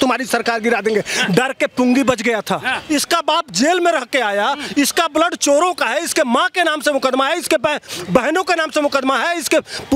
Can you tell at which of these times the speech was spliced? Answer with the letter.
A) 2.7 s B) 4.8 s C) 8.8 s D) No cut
A